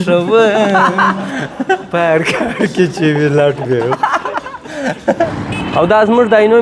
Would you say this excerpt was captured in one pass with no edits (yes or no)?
no